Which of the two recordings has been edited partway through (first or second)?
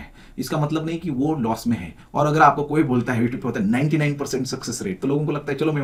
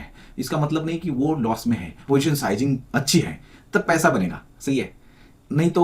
second